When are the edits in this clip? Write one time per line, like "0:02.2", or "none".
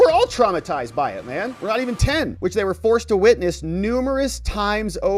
none